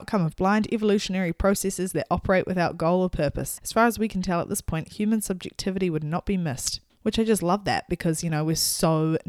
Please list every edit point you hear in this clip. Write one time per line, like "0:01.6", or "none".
0:03.5